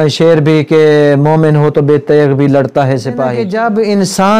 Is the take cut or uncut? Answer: cut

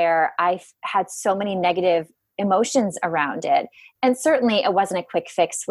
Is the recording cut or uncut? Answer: uncut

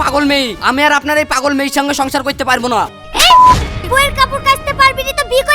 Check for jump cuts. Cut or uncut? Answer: cut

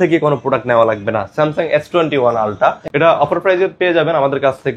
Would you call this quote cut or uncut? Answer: cut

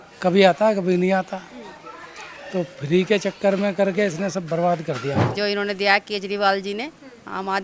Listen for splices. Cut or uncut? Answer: cut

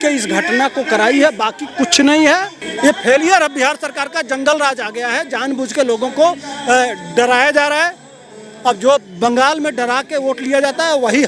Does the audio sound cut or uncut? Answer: cut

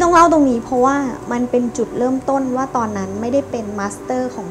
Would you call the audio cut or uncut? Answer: uncut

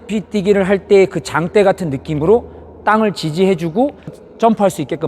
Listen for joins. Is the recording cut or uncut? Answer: cut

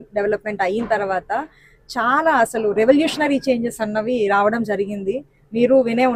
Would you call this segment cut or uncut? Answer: uncut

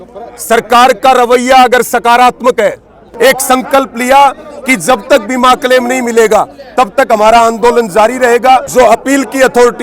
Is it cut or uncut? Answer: cut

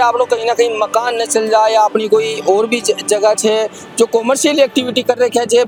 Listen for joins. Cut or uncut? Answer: uncut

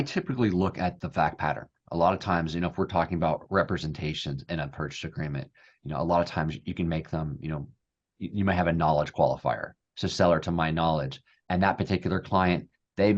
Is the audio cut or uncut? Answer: cut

